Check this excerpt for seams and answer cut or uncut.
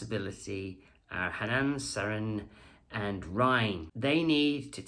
cut